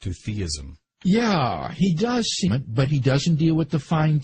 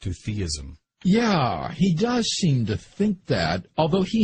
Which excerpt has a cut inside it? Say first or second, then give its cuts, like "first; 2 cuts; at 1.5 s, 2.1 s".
second; 1 cut; at 2.5 s